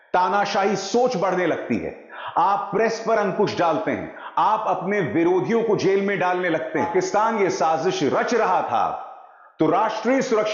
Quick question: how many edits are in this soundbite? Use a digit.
1